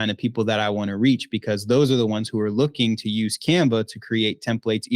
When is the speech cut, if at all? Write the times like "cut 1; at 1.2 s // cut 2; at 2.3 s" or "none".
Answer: none